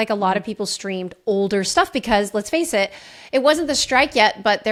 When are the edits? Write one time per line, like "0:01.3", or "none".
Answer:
none